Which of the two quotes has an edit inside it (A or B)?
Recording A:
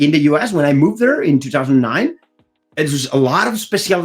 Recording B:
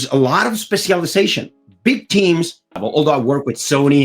B